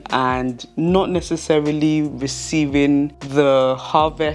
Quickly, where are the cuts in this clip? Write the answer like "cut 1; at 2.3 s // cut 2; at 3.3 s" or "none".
cut 1; at 3.2 s